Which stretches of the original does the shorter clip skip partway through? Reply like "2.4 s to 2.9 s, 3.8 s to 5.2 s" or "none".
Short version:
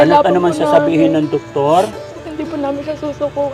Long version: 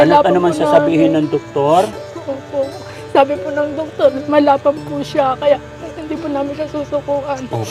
2.1 s to 5.8 s

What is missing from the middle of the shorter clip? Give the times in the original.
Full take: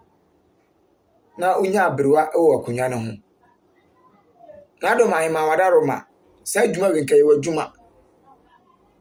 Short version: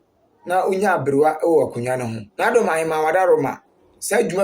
3.1 s to 4.6 s

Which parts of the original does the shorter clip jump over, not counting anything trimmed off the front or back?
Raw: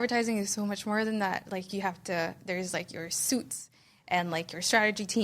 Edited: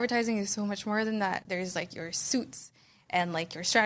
1.4 s to 2.4 s

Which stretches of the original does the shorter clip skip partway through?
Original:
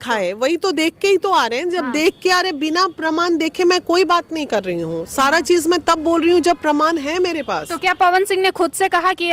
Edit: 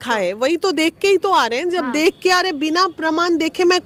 none

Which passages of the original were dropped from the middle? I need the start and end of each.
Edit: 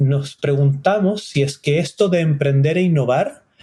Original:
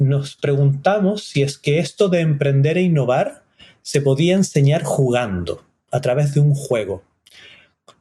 none

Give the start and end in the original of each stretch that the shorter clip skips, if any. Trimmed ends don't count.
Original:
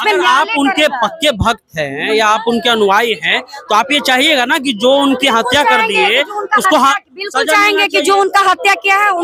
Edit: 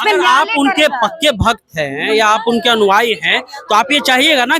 none

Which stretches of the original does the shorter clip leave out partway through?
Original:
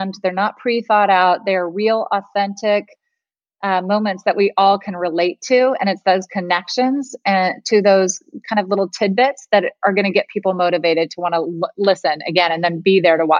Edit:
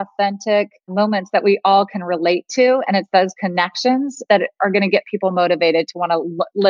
3.1 s to 3.8 s, 7.1 s to 9.4 s

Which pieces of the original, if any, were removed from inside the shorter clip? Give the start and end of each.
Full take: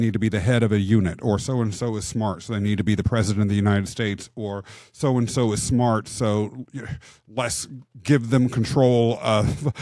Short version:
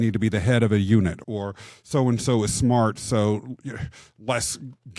1.2 s to 4.3 s

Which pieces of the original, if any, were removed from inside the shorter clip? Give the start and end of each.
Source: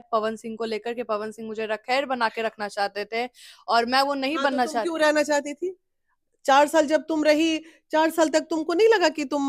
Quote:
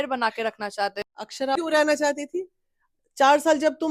3.6 s to 4.9 s

